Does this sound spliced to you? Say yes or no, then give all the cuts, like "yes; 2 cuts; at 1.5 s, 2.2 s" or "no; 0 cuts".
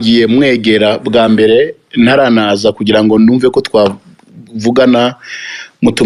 no; 0 cuts